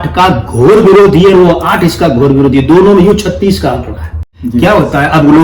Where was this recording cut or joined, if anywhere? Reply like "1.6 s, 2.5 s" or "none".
4.4 s